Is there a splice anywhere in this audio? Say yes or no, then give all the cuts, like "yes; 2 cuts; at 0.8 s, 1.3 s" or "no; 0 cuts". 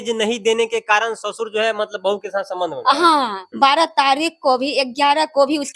yes; 1 cut; at 3.4 s